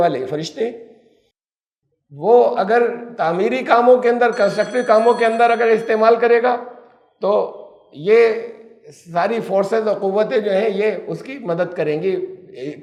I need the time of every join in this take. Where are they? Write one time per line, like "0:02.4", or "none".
none